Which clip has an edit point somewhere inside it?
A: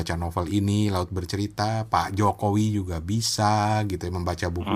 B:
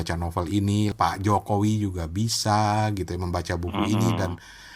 B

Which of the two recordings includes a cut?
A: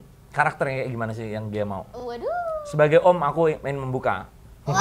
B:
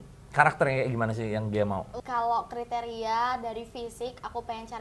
B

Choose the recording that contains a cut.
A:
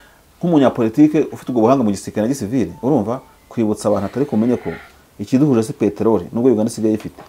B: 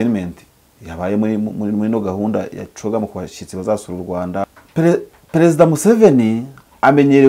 B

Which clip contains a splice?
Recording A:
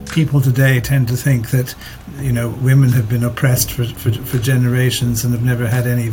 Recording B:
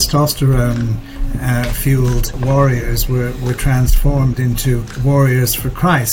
B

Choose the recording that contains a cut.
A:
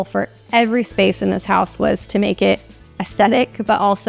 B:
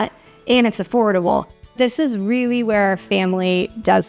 B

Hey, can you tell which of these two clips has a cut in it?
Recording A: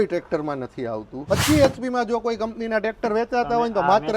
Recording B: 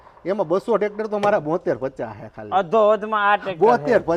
A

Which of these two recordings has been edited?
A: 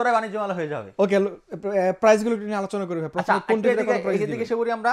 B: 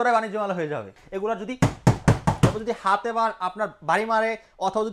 B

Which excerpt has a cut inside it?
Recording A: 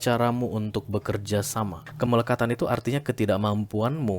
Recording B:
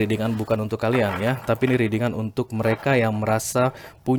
A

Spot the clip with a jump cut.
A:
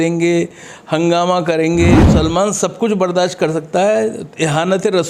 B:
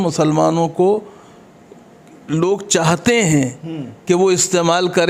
A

